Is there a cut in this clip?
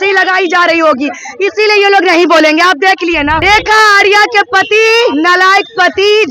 yes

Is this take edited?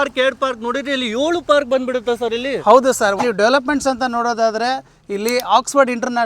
yes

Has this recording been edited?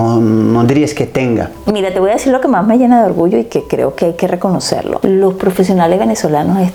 no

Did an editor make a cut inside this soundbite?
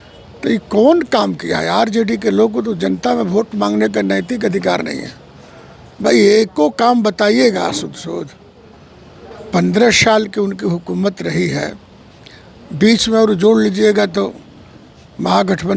no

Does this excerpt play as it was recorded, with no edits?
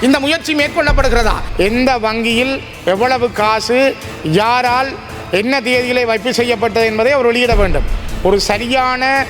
no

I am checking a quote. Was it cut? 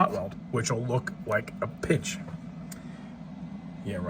no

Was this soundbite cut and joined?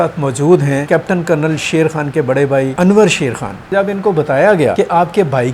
yes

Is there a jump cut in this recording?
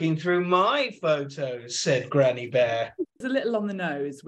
yes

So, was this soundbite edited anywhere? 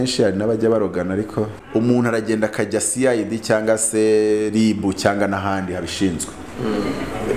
yes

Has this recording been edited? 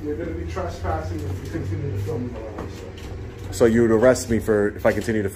no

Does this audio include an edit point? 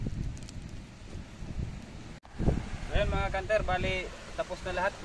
yes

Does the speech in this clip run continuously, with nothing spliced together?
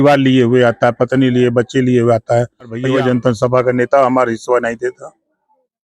no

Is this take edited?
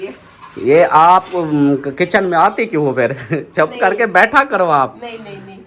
no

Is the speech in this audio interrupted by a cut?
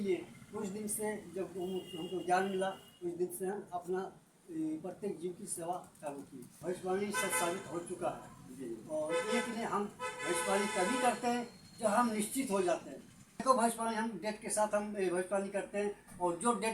yes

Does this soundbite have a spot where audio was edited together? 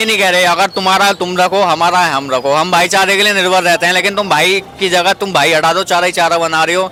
no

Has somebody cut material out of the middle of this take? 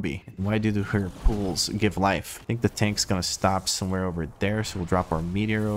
yes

